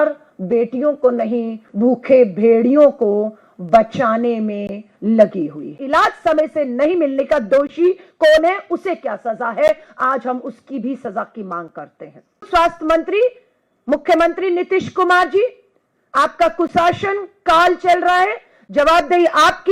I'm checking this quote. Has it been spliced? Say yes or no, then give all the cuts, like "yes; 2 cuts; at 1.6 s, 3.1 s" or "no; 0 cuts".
yes; 2 cuts; at 5.8 s, 12.5 s